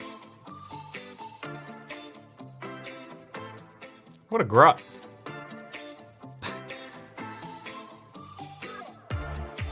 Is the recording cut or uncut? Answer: uncut